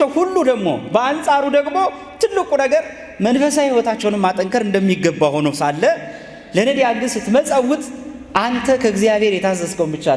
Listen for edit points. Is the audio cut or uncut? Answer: uncut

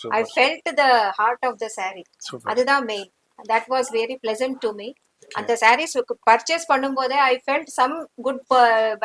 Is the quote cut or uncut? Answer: uncut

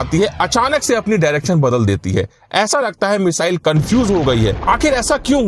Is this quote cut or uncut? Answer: cut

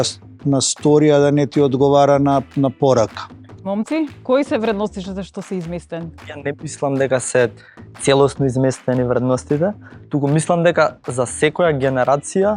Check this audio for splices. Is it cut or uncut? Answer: cut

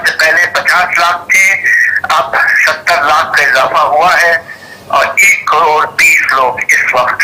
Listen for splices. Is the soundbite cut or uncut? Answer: uncut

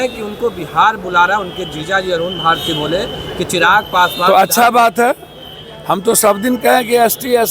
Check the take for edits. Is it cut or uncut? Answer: uncut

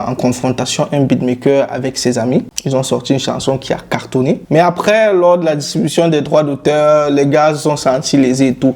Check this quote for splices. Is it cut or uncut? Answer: cut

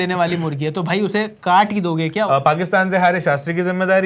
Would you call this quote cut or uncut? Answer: cut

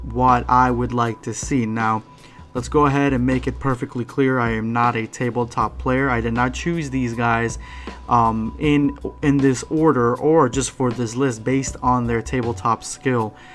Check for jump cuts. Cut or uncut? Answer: cut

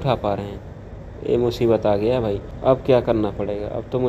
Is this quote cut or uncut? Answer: cut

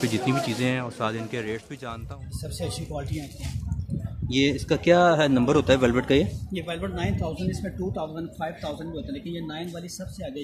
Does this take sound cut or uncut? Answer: cut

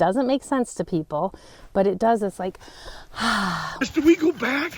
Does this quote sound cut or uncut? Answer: cut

